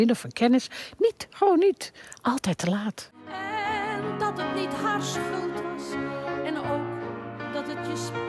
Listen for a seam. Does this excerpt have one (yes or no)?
yes